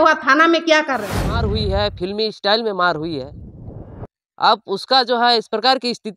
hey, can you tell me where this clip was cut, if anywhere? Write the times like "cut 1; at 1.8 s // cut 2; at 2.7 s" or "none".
cut 1; at 1.5 s

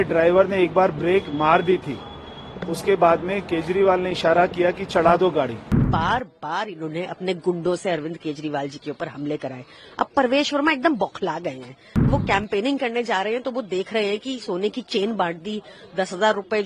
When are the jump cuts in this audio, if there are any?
cut 1; at 5.9 s // cut 2; at 12.1 s

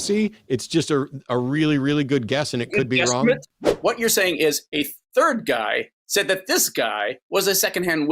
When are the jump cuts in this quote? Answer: cut 1; at 3.6 s

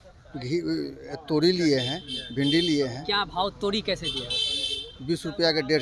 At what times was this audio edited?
none

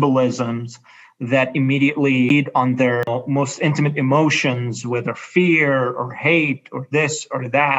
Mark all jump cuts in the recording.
cut 1; at 2.3 s // cut 2; at 3.1 s

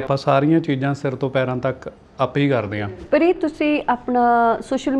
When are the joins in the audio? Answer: cut 1; at 2.7 s

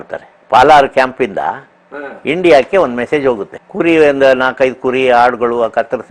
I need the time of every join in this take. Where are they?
cut 1; at 3.5 s

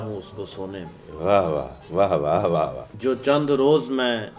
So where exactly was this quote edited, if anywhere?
cut 1; at 2.8 s

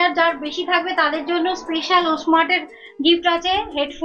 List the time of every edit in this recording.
none

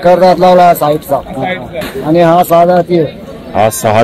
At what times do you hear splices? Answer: cut 1; at 1.8 s

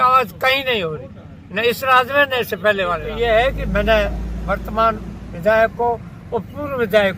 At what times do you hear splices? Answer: cut 1; at 3.1 s

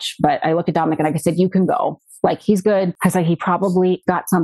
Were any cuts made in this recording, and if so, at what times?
none

